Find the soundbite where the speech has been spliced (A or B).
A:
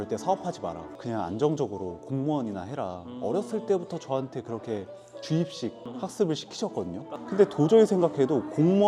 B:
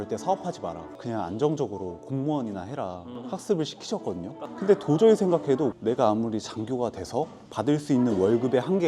B